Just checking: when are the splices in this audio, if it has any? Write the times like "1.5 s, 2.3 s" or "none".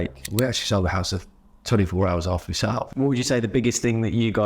2.9 s